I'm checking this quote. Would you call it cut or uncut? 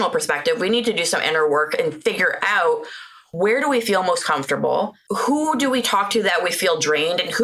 cut